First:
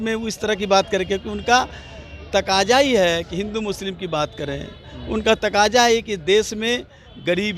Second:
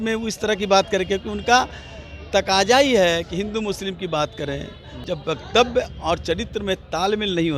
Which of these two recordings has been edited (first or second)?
second